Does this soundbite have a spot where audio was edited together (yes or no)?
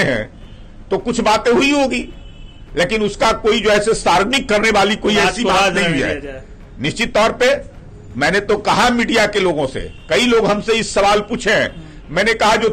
no